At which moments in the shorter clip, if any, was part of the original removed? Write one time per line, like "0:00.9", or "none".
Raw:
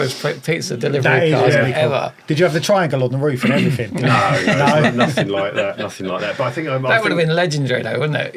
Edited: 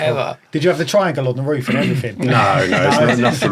none